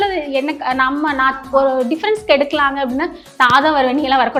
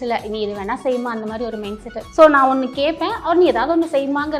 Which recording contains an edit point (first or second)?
second